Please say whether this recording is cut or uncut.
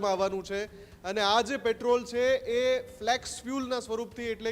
uncut